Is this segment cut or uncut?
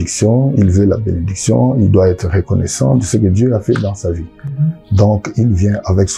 uncut